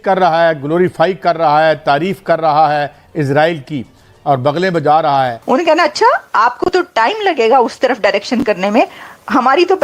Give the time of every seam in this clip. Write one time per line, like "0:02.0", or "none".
0:05.4